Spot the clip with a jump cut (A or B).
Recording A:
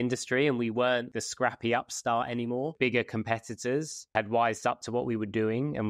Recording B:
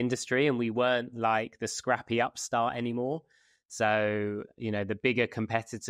A